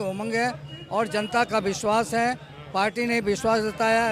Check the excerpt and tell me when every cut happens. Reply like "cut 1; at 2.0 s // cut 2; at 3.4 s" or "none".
none